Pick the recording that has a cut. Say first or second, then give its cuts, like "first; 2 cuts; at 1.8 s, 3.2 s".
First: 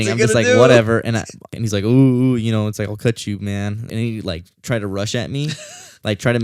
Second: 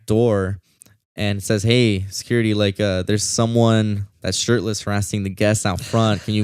first; 2 cuts; at 1.4 s, 3.9 s